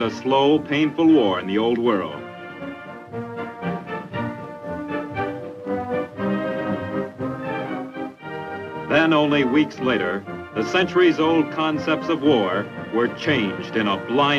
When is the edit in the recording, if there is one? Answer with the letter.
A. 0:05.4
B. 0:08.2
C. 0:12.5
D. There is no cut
A